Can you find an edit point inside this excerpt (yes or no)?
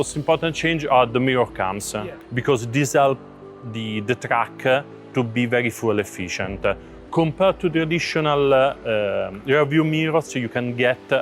yes